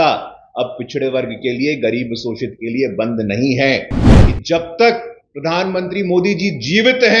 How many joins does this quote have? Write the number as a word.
one